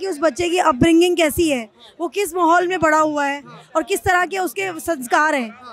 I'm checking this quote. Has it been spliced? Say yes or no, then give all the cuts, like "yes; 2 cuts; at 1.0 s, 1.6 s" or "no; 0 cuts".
no; 0 cuts